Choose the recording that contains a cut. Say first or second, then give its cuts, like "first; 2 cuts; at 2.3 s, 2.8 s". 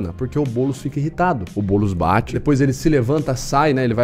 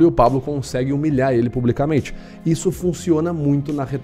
first; 2 cuts; at 1.5 s, 2.4 s